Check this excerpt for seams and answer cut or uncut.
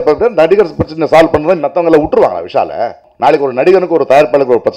cut